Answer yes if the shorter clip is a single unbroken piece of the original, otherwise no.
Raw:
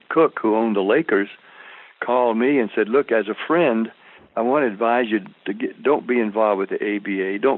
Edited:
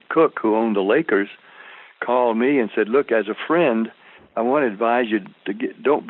yes